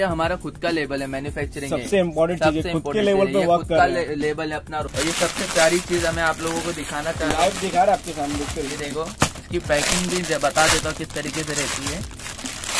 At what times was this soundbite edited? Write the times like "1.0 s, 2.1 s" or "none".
4.8 s